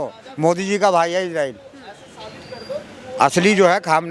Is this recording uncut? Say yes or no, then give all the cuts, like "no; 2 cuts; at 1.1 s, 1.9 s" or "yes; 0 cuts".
yes; 0 cuts